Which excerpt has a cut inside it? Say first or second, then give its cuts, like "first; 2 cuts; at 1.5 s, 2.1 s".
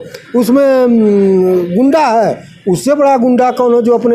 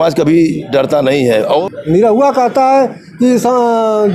second; 1 cut; at 1.4 s